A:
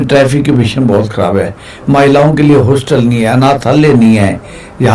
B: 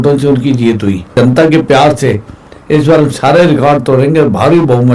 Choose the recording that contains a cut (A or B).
B